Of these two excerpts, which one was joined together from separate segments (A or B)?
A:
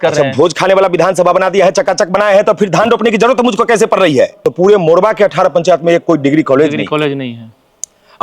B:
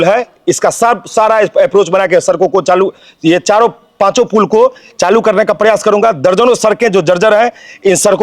A